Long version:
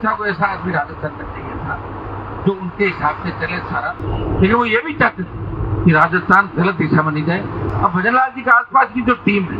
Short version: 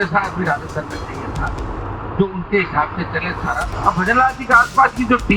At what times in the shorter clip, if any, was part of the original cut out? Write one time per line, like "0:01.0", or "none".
0:03.7